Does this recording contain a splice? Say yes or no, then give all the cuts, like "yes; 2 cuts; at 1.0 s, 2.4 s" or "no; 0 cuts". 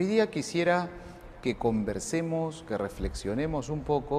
no; 0 cuts